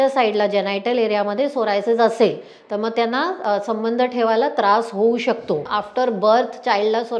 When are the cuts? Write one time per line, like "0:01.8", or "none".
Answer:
0:05.7